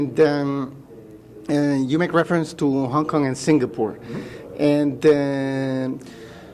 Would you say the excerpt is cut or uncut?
cut